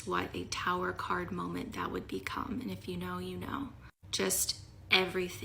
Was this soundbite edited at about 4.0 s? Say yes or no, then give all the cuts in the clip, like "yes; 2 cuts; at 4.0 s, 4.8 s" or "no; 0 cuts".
no; 0 cuts